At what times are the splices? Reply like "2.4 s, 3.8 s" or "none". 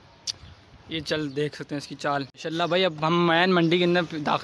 2.3 s